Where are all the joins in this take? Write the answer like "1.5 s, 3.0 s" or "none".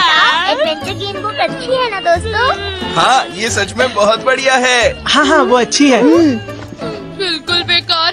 none